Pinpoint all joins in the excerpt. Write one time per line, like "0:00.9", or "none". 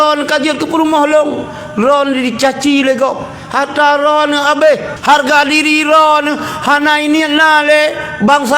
0:04.9